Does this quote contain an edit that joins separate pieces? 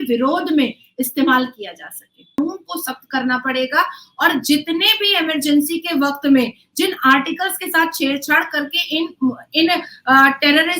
yes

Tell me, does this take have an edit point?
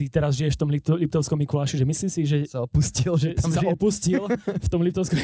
no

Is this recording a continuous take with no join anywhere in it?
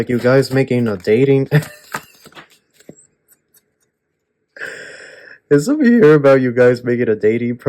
yes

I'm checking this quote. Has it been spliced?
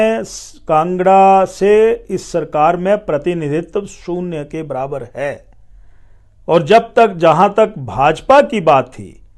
no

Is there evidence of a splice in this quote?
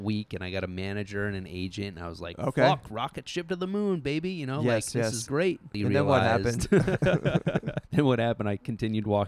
yes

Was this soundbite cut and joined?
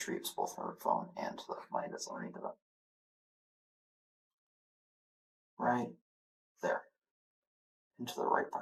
no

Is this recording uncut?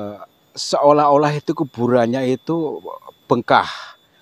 yes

